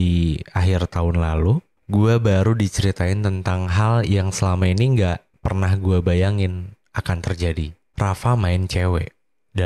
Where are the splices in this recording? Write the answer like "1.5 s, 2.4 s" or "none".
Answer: 1.7 s, 7.8 s